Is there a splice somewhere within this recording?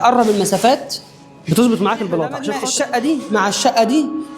yes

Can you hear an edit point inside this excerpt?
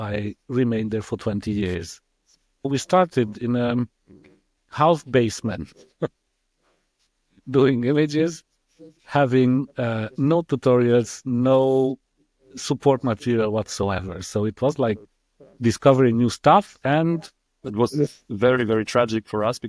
yes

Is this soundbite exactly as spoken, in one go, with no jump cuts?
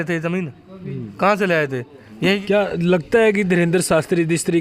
no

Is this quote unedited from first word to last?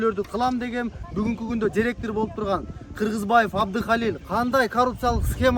no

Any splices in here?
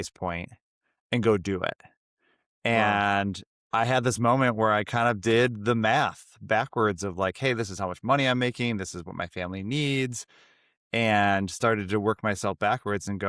no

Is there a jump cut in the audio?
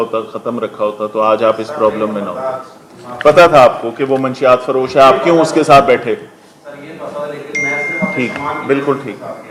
no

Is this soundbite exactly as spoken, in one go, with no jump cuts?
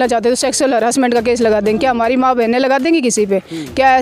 yes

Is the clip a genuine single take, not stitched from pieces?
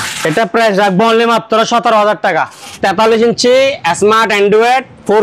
no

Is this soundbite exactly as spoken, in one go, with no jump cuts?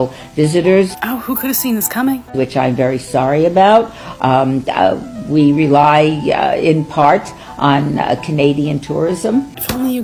yes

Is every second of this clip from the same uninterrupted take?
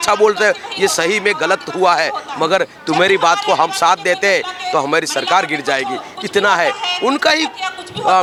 yes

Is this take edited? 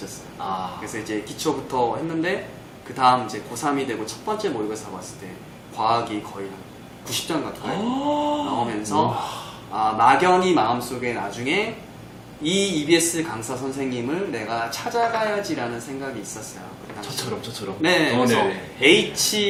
no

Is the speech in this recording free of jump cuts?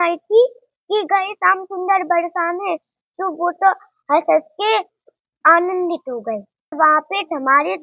no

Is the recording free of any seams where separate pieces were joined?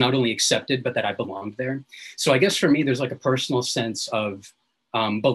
yes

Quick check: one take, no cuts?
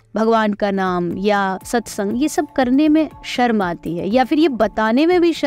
yes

